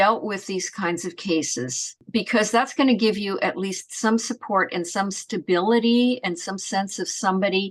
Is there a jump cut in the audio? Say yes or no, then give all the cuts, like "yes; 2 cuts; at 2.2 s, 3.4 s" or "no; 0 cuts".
no; 0 cuts